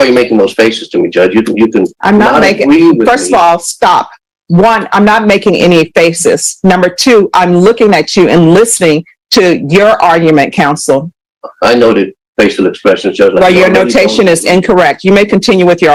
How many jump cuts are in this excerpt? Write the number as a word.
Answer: zero